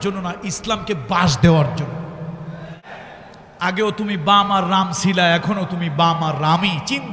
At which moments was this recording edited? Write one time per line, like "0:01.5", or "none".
0:03.0